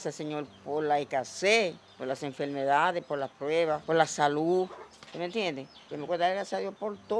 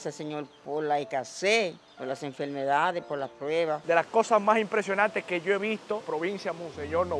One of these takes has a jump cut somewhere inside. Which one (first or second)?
second